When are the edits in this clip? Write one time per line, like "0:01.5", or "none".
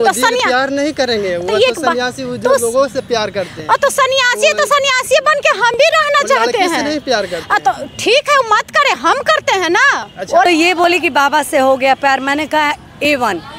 0:10.5